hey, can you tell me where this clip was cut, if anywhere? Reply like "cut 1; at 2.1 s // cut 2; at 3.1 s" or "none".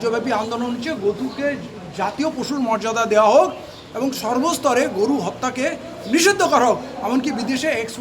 none